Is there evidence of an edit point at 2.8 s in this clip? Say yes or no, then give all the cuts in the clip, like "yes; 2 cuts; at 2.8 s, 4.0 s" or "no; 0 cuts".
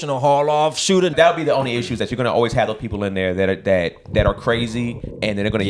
no; 1 cut; at 1.1 s